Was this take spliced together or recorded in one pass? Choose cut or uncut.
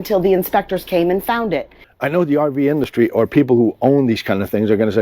cut